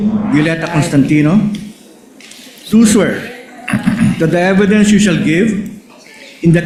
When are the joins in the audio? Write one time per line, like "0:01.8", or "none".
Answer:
none